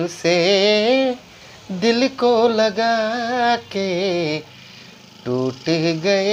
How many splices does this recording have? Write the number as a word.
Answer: zero